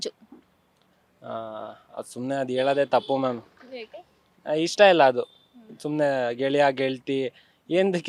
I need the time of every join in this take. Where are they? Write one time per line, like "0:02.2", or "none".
none

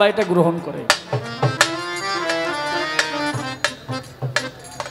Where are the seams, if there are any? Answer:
none

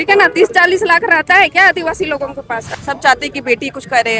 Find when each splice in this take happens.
0:02.7

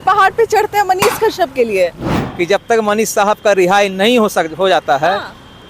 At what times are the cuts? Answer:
0:02.0

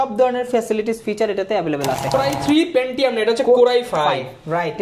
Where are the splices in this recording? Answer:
0:02.1

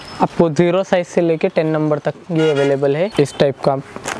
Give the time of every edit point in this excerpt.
0:03.1

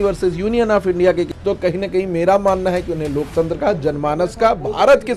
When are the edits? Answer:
0:01.3

